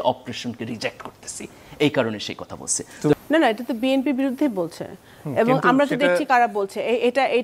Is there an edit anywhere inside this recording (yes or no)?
yes